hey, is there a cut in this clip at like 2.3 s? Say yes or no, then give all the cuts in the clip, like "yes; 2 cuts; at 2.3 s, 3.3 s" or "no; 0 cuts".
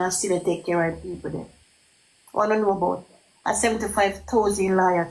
no; 0 cuts